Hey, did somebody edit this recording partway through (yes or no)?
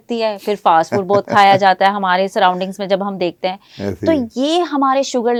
no